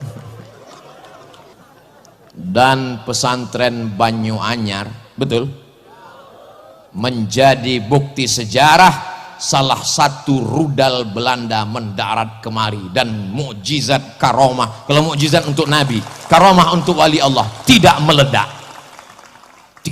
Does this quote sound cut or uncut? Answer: cut